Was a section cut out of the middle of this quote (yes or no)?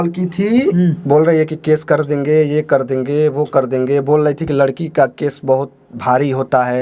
no